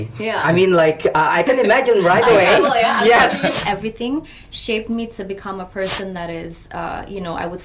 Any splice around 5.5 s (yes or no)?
no